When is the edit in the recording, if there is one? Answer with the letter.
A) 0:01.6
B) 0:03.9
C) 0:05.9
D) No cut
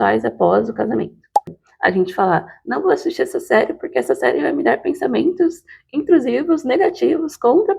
A